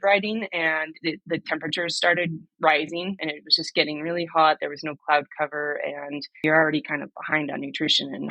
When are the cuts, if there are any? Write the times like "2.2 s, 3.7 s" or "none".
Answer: 3.2 s, 6.4 s